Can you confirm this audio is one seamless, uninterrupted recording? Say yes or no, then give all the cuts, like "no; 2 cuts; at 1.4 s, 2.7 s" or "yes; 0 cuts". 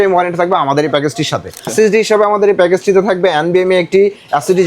no; 1 cut; at 1.7 s